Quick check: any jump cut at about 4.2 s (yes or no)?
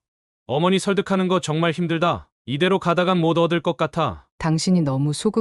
yes